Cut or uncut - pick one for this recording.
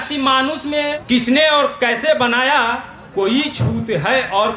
cut